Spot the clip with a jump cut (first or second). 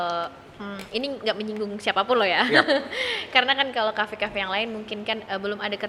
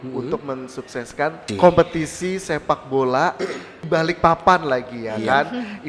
second